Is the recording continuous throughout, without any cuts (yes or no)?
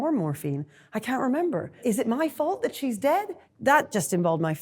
no